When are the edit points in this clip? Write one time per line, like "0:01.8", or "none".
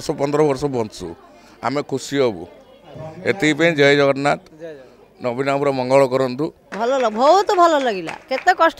0:06.6